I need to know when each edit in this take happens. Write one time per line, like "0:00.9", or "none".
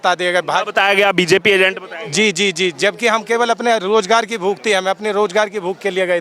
none